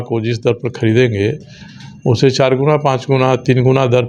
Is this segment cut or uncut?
uncut